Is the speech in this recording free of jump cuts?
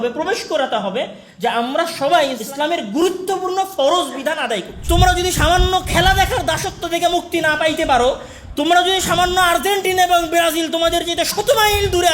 no; 2 cuts; at 2.4 s, 4.7 s

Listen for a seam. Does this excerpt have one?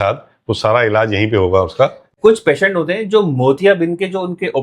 yes; 1 cut; at 2.0 s

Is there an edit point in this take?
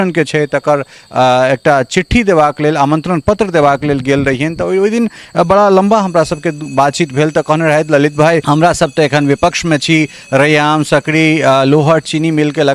yes; 1 cut; at 8.4 s

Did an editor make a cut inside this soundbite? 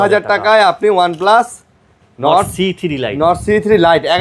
no; 0 cuts

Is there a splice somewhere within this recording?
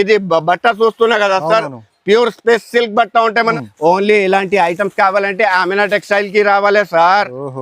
yes; 1 cut; at 3.5 s

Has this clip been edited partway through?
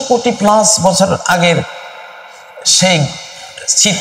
no; 0 cuts

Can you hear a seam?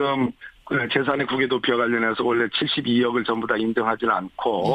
no; 0 cuts

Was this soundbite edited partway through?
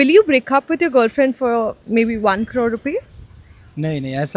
no; 0 cuts

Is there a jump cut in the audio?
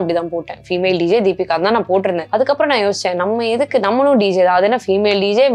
no; 0 cuts

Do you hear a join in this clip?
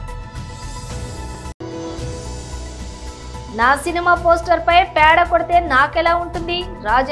yes; 2 cuts; at 1.4 s, 3.5 s

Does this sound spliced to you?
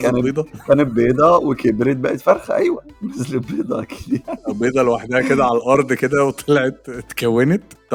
no; 0 cuts

